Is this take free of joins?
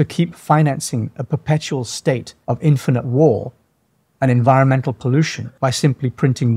no; 2 cuts; at 2.3 s, 5.4 s

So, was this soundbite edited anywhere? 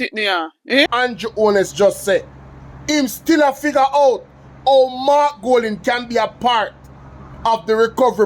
yes; 1 cut; at 0.9 s

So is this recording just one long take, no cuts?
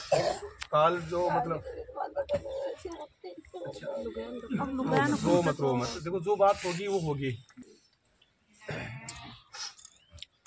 no; 1 cut; at 7.6 s

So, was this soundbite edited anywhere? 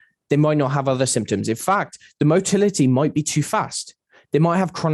no; 0 cuts

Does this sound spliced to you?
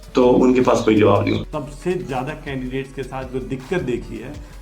yes; 1 cut; at 1.5 s

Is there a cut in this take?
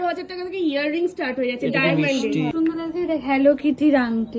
yes; 1 cut; at 2.5 s

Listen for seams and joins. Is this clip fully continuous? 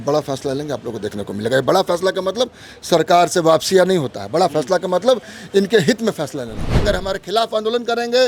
no; 1 cut; at 6.8 s

